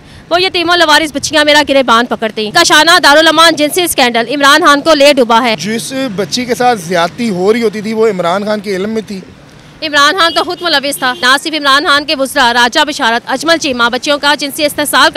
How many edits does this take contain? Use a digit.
3